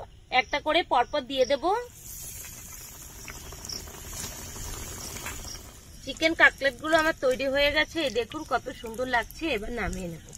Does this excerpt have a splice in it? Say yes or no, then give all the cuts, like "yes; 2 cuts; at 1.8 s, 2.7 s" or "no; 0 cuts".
yes; 2 cuts; at 3.0 s, 5.7 s